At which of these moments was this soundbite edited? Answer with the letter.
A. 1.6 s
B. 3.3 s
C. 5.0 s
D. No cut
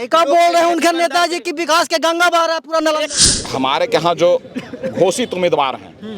B